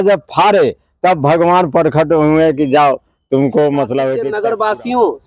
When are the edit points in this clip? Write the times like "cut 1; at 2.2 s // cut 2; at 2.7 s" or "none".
cut 1; at 4.3 s